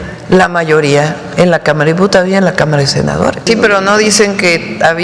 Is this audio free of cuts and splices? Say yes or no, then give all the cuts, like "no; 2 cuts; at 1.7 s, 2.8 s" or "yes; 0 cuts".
no; 1 cut; at 3.4 s